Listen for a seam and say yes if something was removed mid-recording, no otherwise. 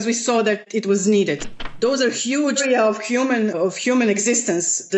yes